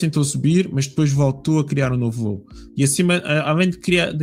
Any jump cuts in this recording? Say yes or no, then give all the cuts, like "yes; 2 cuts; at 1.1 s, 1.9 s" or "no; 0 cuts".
no; 0 cuts